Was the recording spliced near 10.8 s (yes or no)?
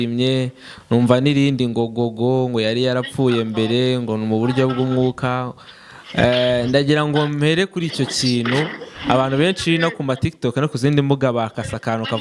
no